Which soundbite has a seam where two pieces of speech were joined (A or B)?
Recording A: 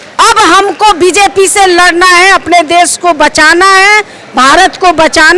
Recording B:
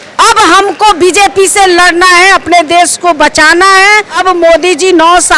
B